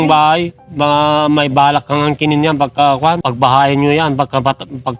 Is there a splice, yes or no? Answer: yes